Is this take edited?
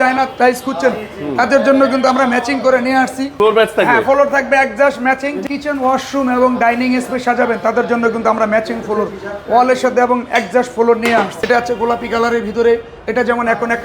yes; 3 cuts; at 3.3 s, 5.4 s, 11.3 s

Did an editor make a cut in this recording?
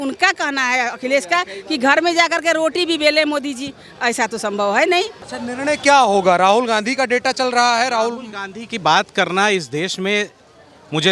yes; 1 cut; at 5.2 s

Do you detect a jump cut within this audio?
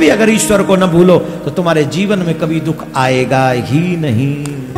no; 0 cuts

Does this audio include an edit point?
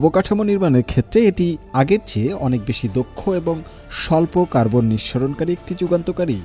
no; 0 cuts

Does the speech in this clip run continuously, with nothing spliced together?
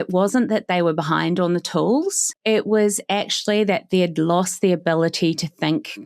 no; 1 cut; at 2.3 s

